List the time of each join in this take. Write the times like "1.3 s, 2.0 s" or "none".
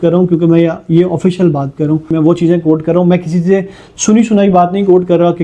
2.1 s